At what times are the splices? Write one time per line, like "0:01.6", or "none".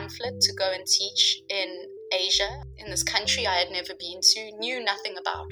none